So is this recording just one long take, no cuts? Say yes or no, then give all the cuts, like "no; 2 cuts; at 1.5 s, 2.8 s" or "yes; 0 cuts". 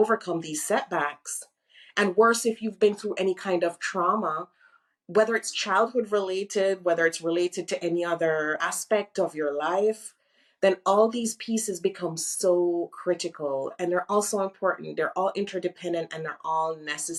yes; 0 cuts